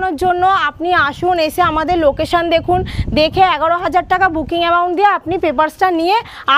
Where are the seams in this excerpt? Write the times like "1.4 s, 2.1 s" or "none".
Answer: none